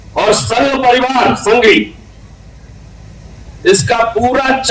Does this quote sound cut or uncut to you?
uncut